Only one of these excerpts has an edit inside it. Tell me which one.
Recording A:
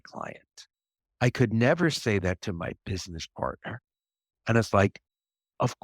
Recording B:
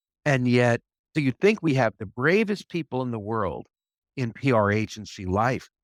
A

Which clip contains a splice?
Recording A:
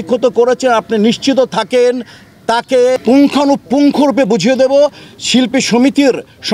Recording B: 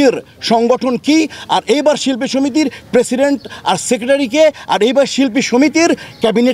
A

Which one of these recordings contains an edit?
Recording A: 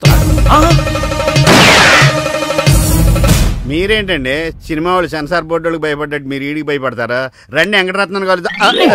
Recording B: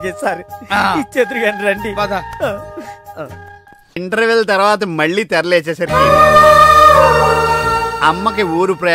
B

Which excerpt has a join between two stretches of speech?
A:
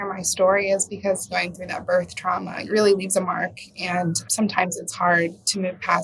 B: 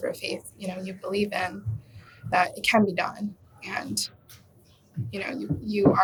A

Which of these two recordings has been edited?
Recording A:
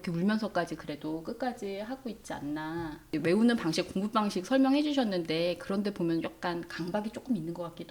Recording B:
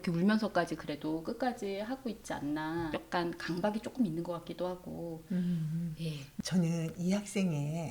B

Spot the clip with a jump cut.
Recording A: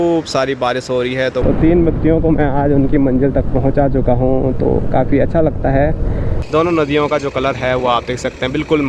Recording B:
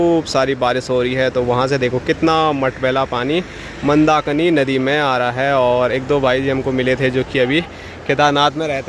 A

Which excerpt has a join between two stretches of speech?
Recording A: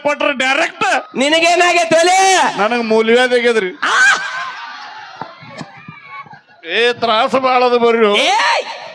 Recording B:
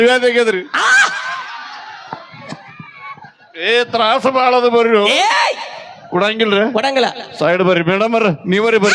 A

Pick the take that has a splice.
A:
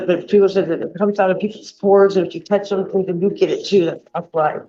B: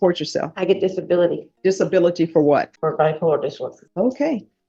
B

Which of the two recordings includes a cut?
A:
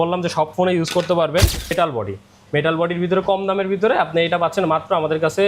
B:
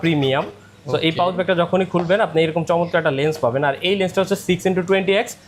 A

